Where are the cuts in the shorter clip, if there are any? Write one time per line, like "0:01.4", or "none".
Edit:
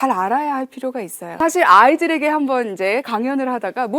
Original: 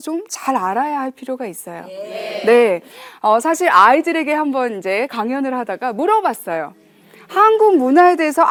0:01.4